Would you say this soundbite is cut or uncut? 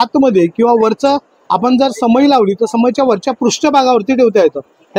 uncut